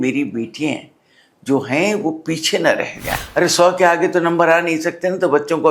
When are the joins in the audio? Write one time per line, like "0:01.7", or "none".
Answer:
0:03.1